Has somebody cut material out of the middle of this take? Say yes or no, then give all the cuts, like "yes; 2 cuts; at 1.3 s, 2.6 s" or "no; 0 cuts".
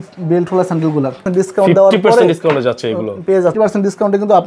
yes; 2 cuts; at 1.2 s, 3.5 s